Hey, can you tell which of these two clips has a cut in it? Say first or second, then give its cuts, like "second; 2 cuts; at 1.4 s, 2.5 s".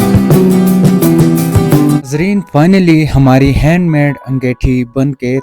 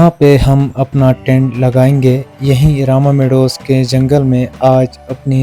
first; 1 cut; at 2.0 s